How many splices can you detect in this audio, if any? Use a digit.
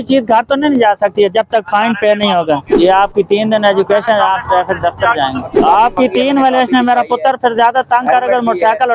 2